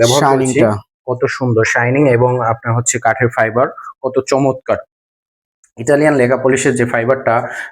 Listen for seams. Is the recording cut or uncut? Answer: uncut